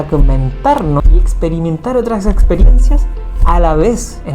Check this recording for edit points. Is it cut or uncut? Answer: cut